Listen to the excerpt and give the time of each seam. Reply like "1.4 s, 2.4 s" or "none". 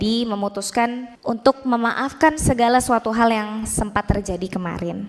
1.1 s